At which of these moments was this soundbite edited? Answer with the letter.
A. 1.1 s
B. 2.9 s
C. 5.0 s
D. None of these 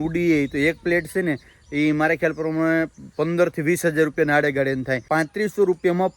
C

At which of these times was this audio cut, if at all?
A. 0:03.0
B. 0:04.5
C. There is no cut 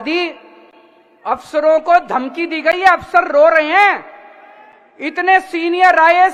C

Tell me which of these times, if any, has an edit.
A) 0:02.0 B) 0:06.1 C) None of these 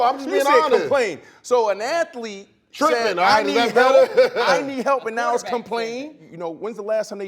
B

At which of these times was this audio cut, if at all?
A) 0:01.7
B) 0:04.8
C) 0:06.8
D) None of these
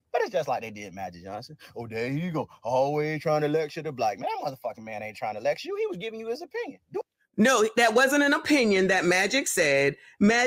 D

